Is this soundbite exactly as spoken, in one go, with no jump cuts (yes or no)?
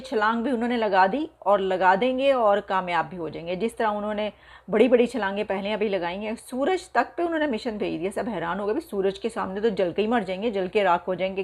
yes